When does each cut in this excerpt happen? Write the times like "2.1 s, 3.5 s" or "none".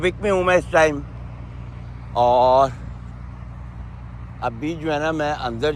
none